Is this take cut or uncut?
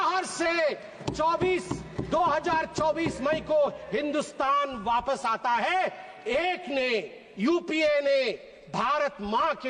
uncut